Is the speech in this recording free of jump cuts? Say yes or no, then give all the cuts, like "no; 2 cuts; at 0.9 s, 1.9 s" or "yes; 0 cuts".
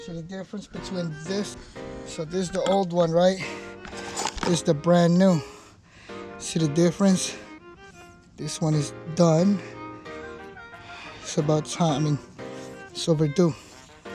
no; 1 cut; at 1.6 s